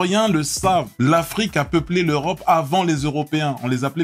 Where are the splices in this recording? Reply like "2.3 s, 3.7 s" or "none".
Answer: 0.9 s